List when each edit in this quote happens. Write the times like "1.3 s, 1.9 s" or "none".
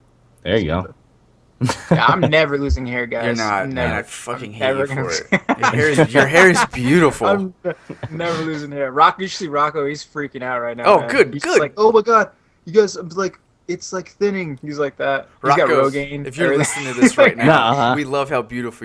2.0 s